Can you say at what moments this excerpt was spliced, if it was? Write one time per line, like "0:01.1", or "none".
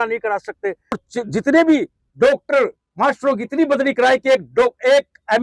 0:01.0